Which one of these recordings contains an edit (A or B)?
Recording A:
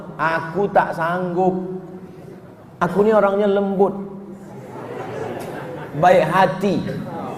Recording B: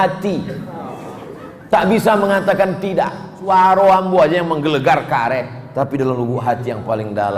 B